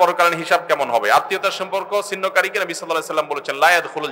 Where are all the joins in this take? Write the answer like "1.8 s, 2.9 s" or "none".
none

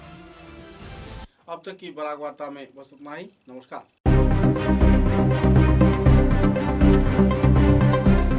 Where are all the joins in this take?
none

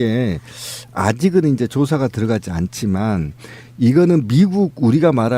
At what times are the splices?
2.5 s

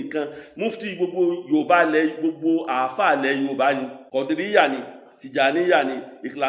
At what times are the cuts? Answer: 4.0 s

